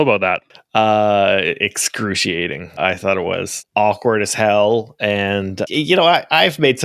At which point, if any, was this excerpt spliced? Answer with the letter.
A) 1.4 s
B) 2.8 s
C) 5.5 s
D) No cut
B